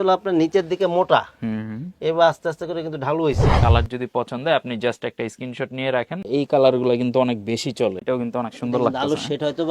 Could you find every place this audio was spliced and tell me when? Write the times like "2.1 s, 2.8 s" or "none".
3.6 s, 6.2 s, 8.0 s